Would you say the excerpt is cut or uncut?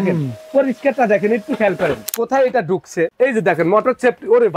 cut